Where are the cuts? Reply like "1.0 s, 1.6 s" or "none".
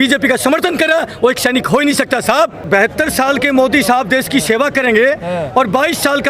2.6 s